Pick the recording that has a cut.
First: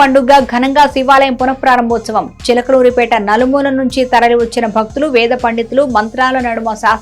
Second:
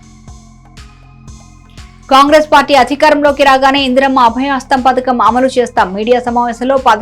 second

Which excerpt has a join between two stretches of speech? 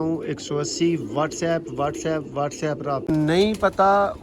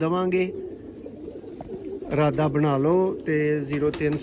first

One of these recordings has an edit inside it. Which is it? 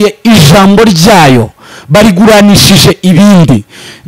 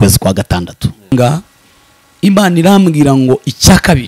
second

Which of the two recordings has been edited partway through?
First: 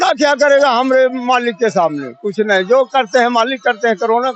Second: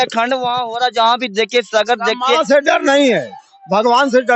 second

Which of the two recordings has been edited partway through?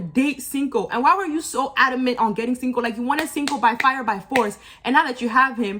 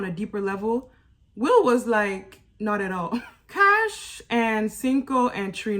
second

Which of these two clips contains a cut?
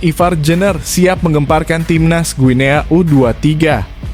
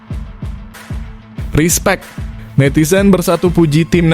second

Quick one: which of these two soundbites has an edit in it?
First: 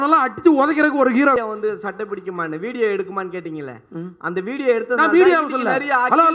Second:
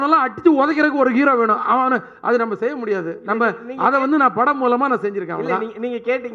first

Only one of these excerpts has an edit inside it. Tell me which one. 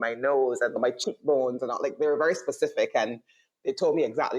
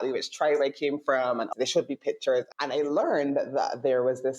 second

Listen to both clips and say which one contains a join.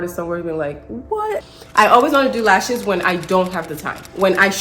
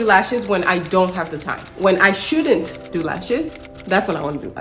first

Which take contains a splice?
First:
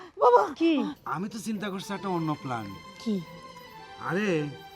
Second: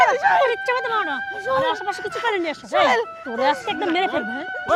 first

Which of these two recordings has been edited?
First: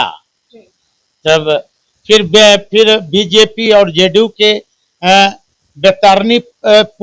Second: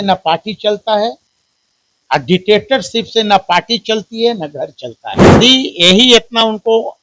second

